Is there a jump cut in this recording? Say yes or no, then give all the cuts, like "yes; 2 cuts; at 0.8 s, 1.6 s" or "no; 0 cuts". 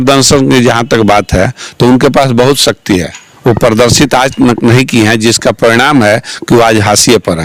no; 0 cuts